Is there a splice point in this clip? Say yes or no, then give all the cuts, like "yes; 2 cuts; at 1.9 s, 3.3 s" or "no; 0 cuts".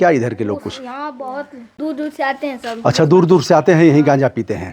yes; 1 cut; at 1.8 s